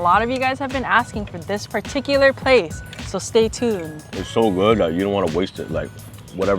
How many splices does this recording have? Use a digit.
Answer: 1